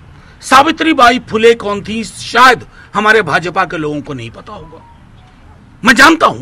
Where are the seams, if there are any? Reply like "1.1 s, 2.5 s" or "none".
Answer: none